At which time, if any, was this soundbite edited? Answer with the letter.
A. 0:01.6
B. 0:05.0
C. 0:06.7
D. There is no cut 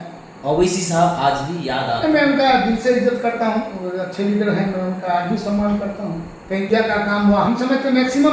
C